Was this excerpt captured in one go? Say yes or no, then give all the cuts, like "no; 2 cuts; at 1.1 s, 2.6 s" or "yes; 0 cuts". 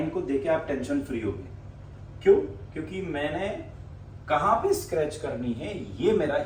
yes; 0 cuts